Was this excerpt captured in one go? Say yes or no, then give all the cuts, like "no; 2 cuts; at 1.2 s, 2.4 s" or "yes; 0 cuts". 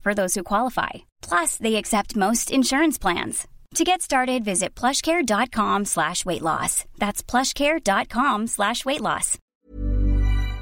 no; 1 cut; at 9.4 s